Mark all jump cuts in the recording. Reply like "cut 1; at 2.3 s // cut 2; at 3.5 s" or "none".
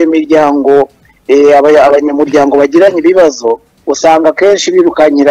none